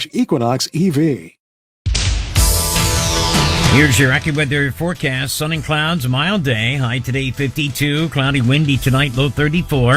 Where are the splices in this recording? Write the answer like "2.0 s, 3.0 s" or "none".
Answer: 1.8 s, 3.7 s